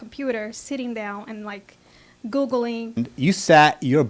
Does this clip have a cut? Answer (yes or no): yes